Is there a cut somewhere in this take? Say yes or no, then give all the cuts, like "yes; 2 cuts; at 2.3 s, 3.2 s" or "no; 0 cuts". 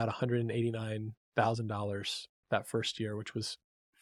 no; 0 cuts